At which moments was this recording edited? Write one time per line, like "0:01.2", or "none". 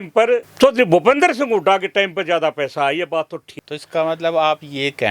0:03.6